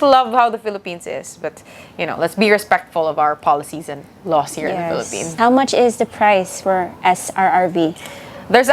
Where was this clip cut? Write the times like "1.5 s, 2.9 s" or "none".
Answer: 5.3 s